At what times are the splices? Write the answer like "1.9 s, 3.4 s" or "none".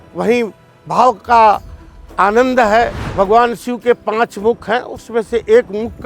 3.0 s